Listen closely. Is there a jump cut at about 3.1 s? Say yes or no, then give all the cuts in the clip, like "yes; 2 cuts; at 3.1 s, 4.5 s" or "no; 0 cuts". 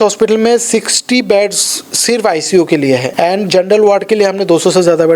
yes; 1 cut; at 3.1 s